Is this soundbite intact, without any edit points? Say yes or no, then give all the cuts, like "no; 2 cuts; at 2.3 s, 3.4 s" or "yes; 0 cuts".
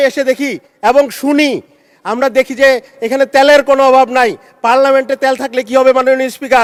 yes; 0 cuts